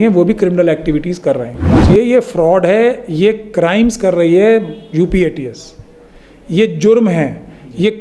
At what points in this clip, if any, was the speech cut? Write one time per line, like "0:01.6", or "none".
0:01.8